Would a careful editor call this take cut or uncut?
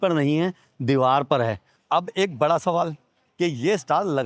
cut